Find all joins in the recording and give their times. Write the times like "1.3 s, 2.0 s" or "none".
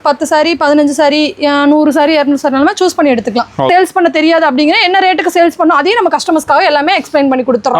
3.7 s